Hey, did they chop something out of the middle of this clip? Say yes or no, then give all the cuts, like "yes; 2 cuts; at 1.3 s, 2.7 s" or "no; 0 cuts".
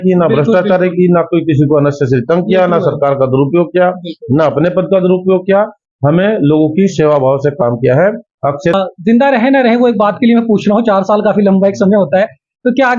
yes; 1 cut; at 8.8 s